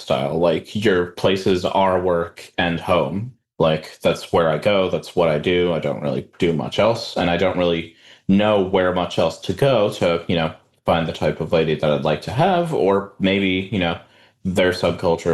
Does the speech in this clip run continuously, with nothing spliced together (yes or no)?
no